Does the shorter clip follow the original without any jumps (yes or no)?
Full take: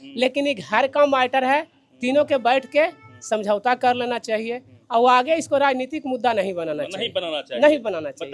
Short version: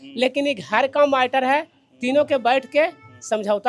yes